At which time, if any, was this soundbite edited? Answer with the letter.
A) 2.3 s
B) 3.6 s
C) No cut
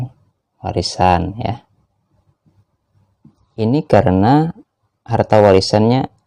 B